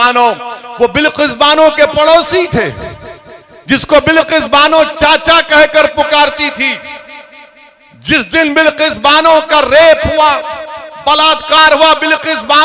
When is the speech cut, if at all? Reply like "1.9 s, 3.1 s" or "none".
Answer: none